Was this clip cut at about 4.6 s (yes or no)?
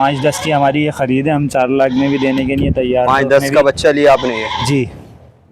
no